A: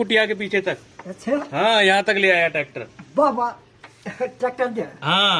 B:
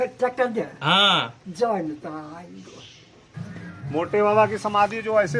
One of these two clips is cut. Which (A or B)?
B